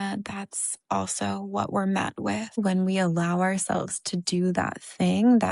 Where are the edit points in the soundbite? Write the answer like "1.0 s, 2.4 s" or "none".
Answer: 2.6 s